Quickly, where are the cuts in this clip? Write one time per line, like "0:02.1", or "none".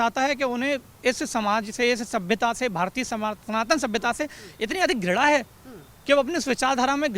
none